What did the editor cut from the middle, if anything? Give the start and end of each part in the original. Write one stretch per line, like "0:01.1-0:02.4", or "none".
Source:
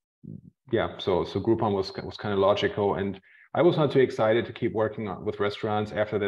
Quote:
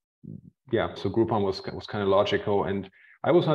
0:01.0-0:01.3